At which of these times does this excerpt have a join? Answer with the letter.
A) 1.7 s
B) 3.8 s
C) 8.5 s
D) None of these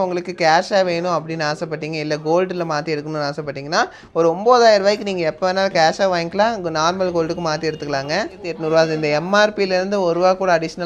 C